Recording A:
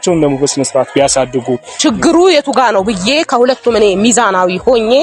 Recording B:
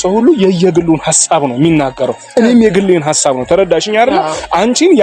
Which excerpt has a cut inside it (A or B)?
A